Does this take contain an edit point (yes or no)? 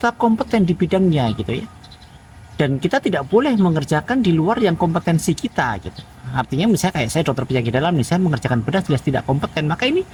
no